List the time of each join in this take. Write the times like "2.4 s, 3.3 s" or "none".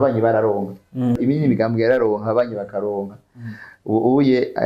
1.2 s